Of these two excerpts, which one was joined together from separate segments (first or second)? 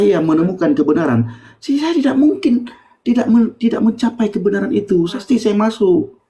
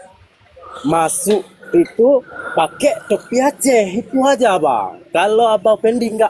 first